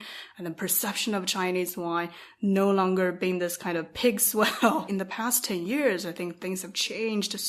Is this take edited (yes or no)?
yes